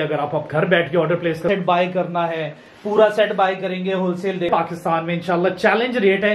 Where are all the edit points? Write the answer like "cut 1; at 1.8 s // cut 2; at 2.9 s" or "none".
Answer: cut 1; at 1.5 s // cut 2; at 4.5 s